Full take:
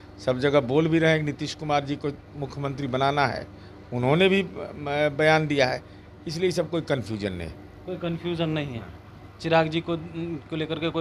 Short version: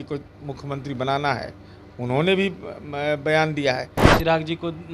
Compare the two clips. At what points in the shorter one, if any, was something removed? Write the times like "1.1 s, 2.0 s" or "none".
4.0 s